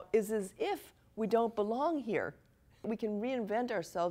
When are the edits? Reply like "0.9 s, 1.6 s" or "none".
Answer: 2.9 s

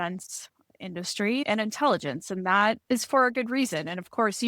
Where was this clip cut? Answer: 1.4 s, 2.8 s

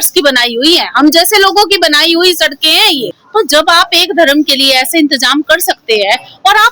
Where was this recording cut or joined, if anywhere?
3.2 s

